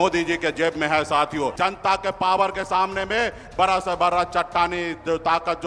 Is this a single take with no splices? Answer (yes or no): no